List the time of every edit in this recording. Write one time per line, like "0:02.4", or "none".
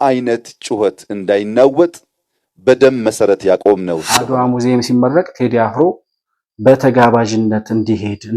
0:04.3

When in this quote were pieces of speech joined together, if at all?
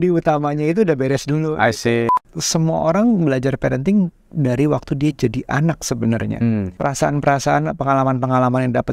0:02.1
0:06.7

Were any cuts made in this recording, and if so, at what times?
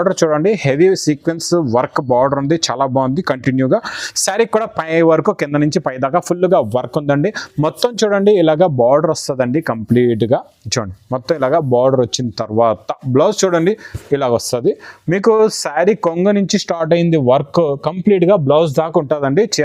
none

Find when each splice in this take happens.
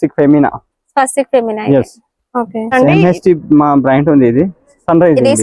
0:02.7

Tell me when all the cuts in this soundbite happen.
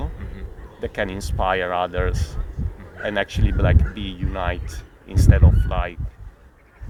none

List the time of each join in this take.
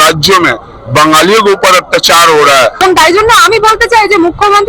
0:02.8

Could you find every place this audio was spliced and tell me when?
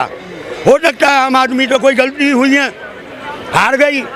none

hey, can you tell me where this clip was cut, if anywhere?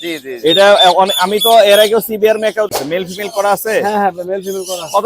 0:02.8

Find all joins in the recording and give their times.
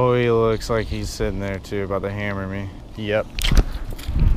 0:02.8

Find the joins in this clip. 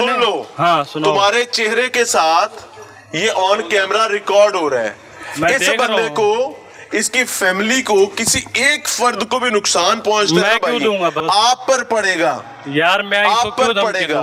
none

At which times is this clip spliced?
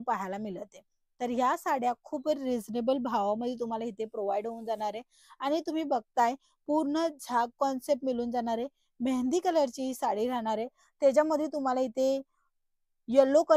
none

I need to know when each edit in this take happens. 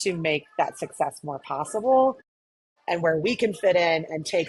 none

